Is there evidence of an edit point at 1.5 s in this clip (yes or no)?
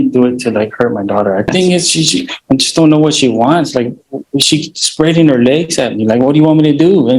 yes